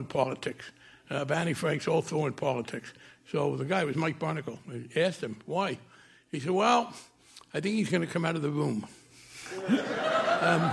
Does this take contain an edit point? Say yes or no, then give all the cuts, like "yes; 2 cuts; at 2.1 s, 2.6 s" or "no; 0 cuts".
no; 0 cuts